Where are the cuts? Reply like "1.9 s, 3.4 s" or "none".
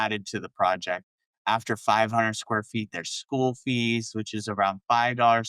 none